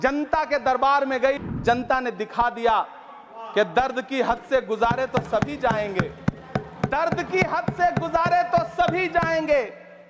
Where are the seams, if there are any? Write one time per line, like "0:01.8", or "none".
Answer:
0:01.4